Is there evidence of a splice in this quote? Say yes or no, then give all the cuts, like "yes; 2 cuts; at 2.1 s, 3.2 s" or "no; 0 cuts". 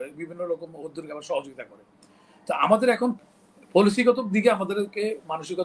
no; 0 cuts